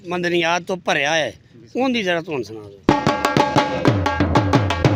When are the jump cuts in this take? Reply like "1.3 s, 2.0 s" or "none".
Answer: none